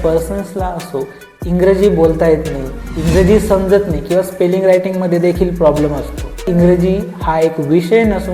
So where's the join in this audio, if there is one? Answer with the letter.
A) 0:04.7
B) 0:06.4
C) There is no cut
B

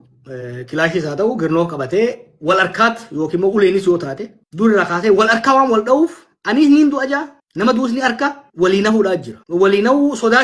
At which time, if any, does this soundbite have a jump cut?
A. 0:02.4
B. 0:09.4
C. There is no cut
C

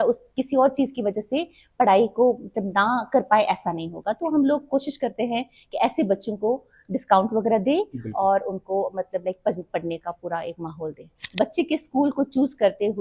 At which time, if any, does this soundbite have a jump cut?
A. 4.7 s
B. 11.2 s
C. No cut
B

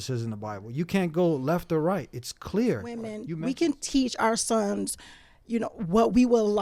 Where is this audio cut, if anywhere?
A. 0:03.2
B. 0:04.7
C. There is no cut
A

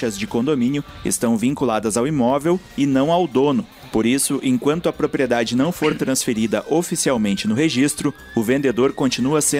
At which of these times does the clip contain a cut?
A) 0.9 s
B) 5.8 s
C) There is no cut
A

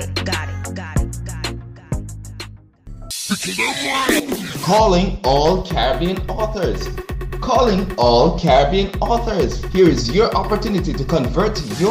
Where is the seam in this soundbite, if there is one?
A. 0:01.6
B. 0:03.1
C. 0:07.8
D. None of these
B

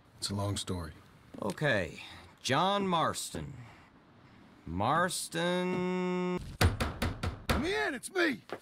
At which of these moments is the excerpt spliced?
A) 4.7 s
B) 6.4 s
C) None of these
B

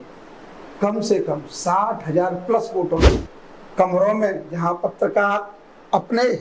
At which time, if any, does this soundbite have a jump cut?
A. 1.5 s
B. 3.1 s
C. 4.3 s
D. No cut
B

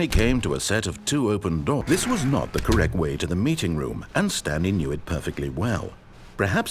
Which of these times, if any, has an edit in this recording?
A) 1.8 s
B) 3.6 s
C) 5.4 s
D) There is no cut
A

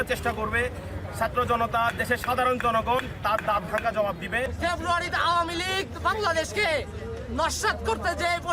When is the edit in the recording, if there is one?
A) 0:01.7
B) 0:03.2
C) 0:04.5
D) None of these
D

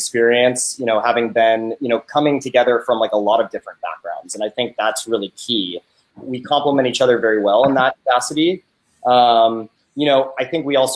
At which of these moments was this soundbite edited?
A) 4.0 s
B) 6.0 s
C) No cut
B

